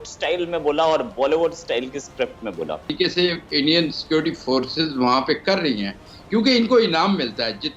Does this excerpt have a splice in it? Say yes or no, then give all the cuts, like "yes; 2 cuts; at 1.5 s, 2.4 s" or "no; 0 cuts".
yes; 1 cut; at 2.9 s